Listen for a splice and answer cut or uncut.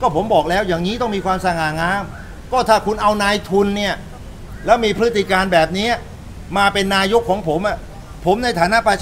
uncut